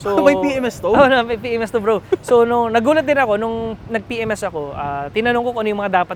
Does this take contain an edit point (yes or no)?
no